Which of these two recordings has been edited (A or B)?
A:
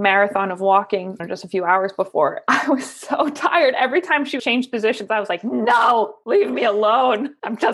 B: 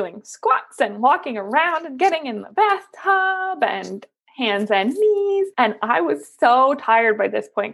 A